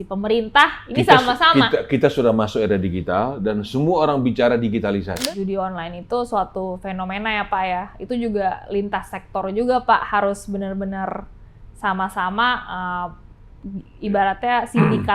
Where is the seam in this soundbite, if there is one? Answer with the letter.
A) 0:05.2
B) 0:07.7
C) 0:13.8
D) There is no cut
A